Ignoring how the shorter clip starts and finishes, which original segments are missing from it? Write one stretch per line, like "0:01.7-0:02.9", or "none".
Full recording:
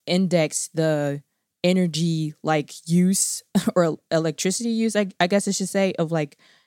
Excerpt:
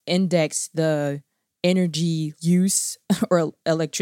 0:02.3-0:02.8

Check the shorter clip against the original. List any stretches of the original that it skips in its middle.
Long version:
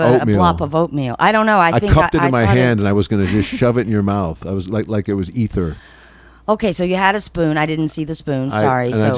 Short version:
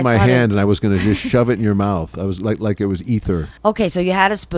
0:05.8-0:06.3

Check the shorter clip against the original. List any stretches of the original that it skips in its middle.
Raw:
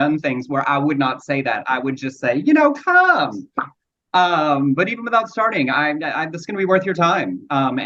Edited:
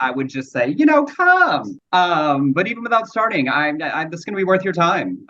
0:03.4-0:03.9

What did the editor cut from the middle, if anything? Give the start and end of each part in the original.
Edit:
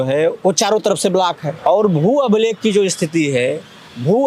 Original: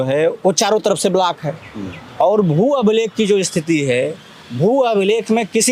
0:01.5-0:02.0

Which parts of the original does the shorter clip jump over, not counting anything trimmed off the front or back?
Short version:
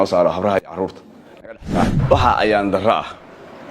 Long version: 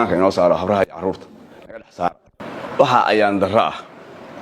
0:02.2-0:02.7

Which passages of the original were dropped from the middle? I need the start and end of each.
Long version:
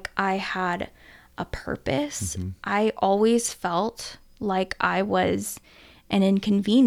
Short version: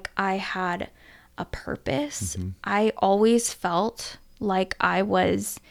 none

